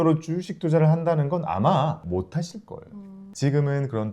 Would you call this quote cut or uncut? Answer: cut